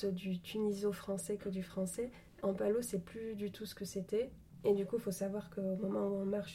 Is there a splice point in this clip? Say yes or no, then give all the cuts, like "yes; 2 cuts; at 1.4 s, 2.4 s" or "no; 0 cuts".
yes; 2 cuts; at 2.4 s, 4.4 s